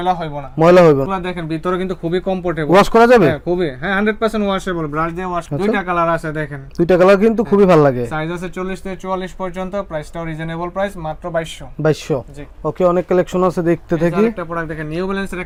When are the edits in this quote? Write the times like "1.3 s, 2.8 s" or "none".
none

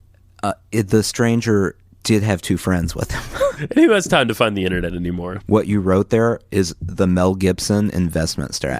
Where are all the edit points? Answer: 3.6 s, 5.3 s

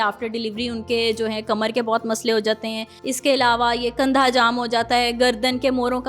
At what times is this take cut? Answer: 2.9 s

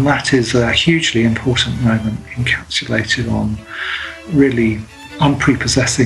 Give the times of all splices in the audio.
5.0 s

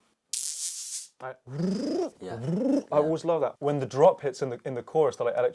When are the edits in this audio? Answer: none

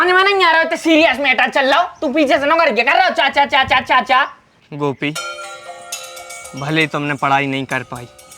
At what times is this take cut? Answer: 4.3 s

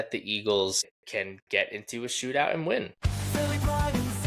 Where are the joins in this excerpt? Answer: 0.9 s, 2.9 s

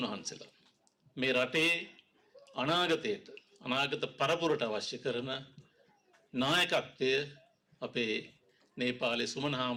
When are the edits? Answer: none

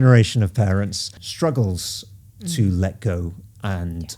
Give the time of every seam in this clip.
1.2 s

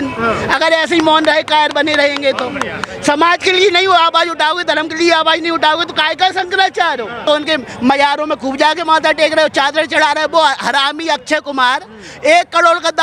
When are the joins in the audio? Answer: 7.2 s

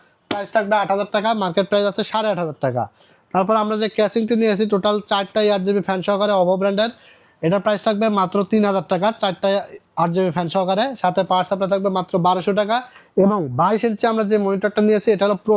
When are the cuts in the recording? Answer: none

